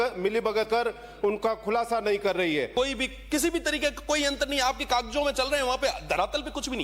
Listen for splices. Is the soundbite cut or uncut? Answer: cut